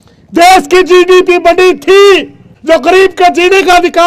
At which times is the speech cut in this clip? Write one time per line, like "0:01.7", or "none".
0:02.5

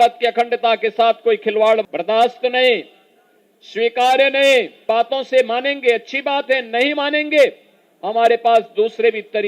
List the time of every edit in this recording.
0:01.9
0:04.8

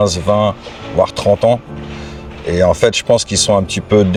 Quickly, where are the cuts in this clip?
none

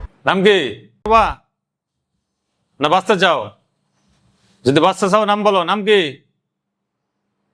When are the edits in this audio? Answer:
0:01.1

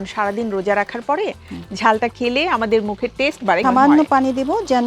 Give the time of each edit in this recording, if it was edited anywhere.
0:03.6

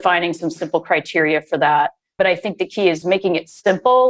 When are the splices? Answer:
0:02.1
0:03.0

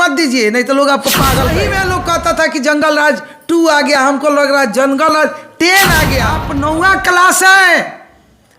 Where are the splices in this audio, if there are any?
0:01.6
0:06.4

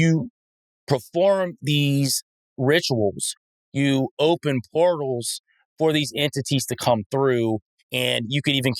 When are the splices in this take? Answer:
0:02.5

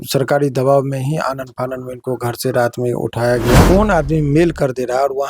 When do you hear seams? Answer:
0:03.6

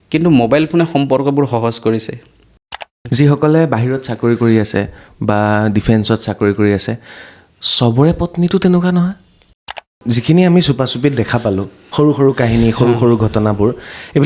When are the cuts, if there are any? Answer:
0:02.7
0:09.8

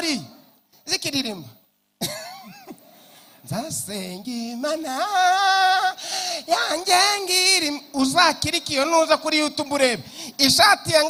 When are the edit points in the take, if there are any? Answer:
none

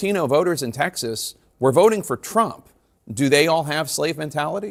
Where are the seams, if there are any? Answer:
none

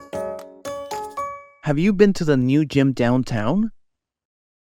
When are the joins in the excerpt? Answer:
0:01.5

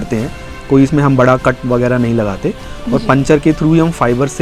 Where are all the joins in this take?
none

